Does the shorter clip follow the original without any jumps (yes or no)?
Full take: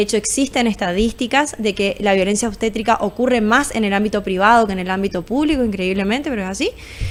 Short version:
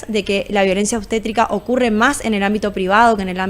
yes